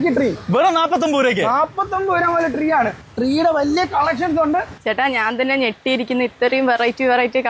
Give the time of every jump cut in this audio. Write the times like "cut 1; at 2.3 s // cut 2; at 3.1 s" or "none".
cut 1; at 3.0 s // cut 2; at 4.8 s